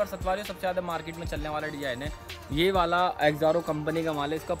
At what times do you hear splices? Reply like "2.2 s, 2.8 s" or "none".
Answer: none